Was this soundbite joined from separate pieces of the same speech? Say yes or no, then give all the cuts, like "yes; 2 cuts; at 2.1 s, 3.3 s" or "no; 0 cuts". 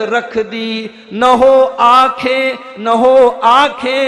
no; 0 cuts